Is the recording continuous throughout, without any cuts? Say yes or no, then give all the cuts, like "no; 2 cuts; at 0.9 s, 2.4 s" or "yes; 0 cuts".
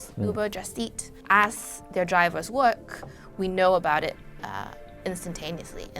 no; 1 cut; at 1.2 s